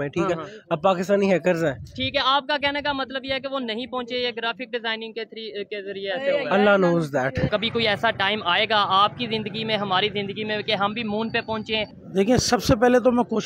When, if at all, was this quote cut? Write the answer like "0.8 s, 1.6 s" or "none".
7.5 s, 11.9 s